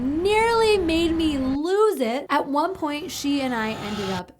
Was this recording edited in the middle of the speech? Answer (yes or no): yes